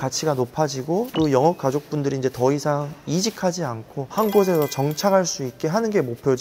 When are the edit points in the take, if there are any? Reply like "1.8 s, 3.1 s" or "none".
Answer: 1.1 s, 3.9 s